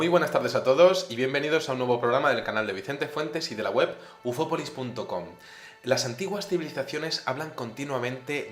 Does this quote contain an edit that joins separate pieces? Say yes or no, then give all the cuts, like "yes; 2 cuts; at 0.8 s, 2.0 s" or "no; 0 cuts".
no; 0 cuts